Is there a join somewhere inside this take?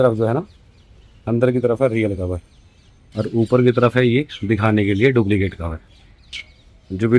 no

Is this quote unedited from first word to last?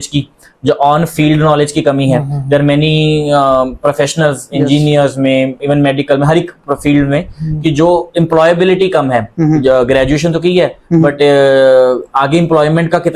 yes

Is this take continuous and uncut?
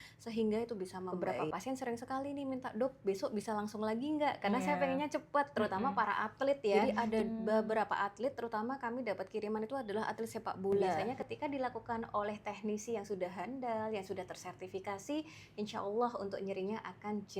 no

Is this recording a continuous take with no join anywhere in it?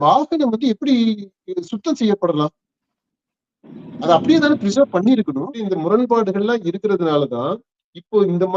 no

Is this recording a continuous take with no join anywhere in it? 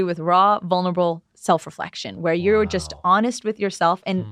no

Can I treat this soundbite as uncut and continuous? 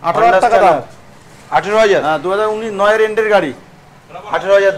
yes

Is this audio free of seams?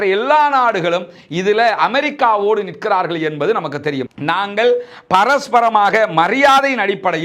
no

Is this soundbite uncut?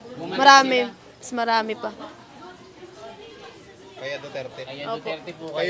yes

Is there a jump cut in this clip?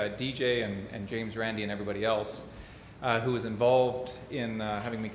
no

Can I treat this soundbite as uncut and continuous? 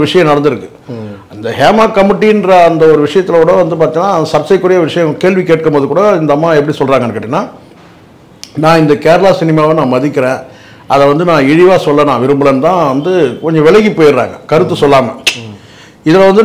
yes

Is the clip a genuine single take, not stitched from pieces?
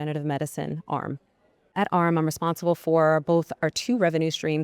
no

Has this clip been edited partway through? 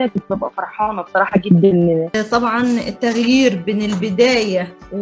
yes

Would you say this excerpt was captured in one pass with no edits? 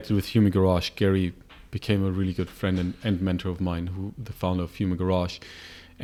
yes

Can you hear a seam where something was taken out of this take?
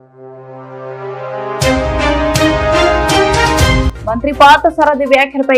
yes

